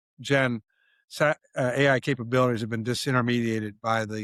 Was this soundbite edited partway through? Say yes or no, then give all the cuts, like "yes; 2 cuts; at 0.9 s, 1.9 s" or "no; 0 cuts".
no; 0 cuts